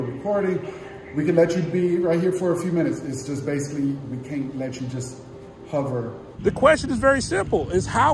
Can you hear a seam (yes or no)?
yes